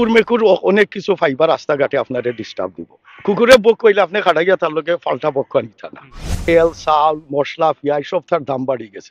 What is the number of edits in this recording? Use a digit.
1